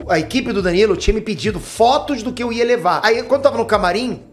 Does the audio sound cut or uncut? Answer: cut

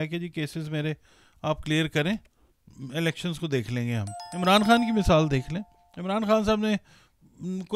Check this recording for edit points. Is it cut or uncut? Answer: cut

